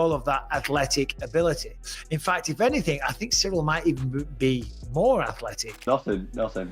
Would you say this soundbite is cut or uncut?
cut